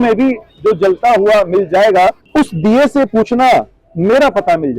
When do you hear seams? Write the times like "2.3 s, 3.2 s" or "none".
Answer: 2.2 s